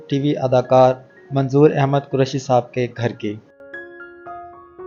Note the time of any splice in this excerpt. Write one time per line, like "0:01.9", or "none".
none